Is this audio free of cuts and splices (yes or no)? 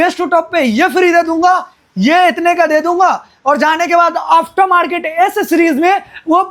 yes